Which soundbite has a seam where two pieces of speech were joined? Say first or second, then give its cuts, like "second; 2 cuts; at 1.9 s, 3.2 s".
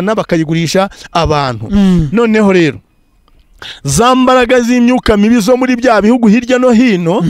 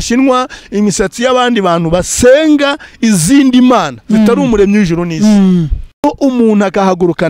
second; 1 cut; at 6.0 s